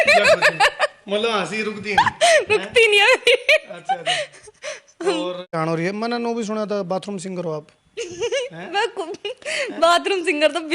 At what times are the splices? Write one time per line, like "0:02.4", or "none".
0:05.5